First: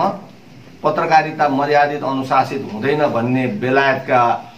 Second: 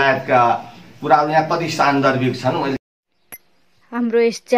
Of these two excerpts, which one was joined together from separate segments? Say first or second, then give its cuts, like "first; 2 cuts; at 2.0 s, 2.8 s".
second; 1 cut; at 2.8 s